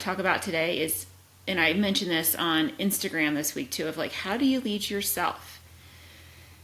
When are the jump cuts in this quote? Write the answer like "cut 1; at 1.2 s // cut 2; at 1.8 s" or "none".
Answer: none